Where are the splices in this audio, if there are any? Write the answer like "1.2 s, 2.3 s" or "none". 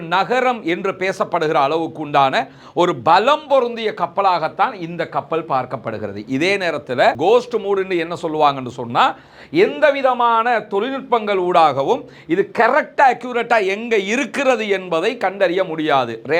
7.2 s